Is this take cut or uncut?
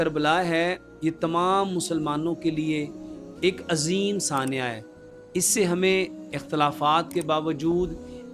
uncut